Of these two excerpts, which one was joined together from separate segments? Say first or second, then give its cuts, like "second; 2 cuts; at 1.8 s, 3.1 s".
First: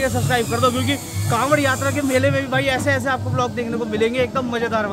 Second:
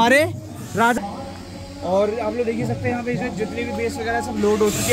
second; 1 cut; at 1.0 s